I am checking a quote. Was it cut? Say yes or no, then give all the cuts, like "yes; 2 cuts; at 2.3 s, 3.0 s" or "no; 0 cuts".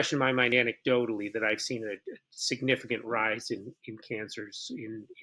no; 0 cuts